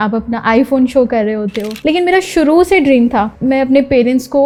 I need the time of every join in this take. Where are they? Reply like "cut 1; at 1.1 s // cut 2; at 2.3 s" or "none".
none